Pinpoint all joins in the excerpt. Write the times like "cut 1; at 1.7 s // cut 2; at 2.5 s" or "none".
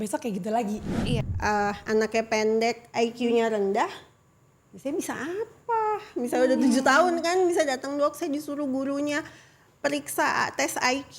cut 1; at 1.3 s